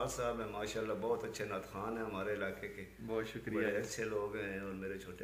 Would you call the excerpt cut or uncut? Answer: uncut